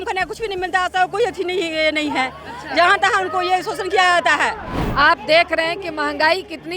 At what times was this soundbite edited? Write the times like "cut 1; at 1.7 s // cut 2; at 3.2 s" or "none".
cut 1; at 4.8 s